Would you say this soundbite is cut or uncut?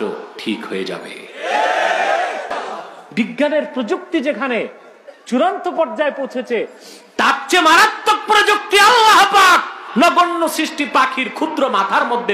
cut